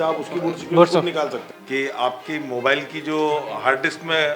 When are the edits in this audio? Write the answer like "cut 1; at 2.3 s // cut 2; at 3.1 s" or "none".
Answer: cut 1; at 1.4 s